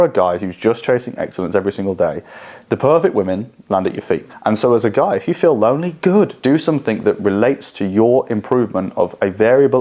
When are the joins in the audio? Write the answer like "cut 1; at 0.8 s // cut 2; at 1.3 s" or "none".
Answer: cut 1; at 4.3 s // cut 2; at 6.4 s